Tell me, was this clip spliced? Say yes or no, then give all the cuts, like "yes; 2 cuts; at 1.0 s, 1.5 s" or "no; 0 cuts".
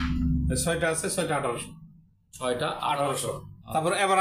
no; 0 cuts